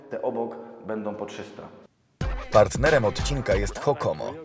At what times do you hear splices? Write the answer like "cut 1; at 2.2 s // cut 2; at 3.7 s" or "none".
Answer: cut 1; at 1.9 s